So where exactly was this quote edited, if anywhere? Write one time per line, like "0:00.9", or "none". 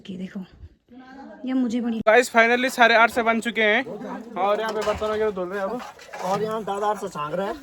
0:02.0